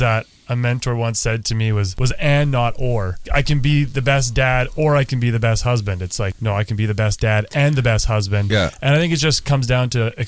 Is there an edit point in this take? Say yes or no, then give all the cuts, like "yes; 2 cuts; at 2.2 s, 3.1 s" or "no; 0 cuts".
yes; 3 cuts; at 1.9 s, 3.2 s, 6.4 s